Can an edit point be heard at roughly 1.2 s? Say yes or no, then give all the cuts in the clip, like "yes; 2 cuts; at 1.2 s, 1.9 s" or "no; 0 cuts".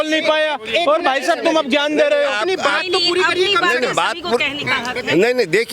no; 0 cuts